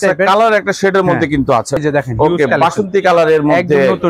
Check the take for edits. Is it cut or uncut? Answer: cut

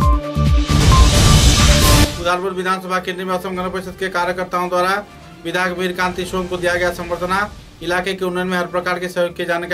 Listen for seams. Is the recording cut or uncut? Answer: cut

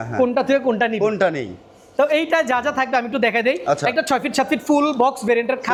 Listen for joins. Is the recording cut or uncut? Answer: uncut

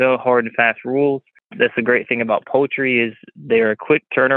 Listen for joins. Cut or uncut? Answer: cut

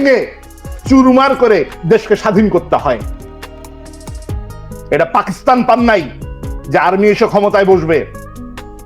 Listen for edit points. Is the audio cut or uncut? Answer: cut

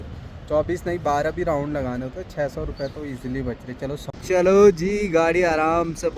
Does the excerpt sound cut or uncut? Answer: cut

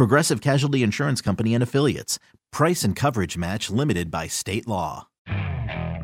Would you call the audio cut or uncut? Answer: cut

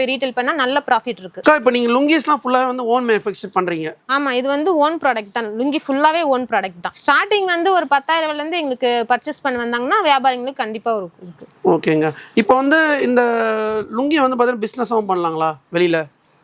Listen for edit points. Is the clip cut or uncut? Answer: uncut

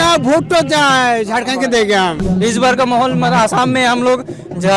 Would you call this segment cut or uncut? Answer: cut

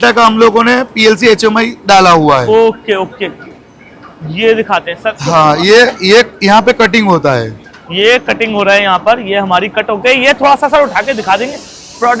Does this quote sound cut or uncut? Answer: uncut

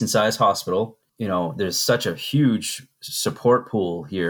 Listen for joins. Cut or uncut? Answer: cut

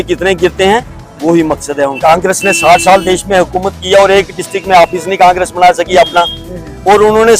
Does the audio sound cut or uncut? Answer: cut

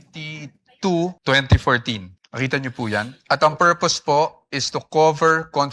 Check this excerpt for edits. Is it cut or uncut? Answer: cut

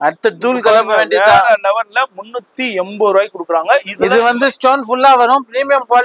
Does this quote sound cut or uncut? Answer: uncut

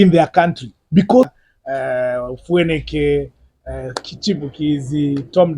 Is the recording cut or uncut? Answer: cut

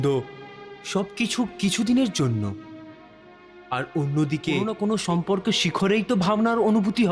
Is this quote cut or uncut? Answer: cut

